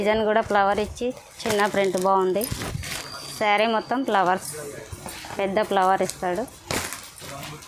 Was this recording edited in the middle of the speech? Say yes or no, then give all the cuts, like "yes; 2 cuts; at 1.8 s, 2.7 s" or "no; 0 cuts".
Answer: no; 0 cuts